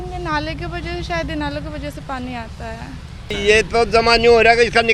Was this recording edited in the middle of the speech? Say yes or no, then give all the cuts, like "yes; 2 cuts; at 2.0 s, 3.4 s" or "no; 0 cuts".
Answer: yes; 1 cut; at 3.3 s